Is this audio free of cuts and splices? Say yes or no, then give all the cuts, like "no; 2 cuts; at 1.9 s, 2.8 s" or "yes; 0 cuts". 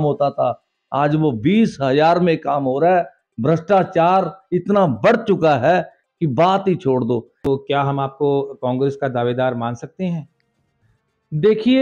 no; 1 cut; at 7.5 s